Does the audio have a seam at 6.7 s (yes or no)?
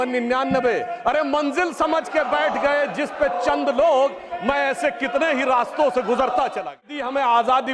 yes